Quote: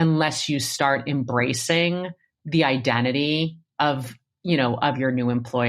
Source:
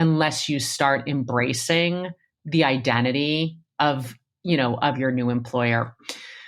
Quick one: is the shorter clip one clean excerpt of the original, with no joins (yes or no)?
yes